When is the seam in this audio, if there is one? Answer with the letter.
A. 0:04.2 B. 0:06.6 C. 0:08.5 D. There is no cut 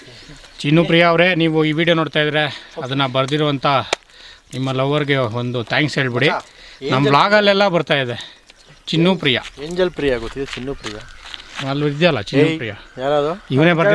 D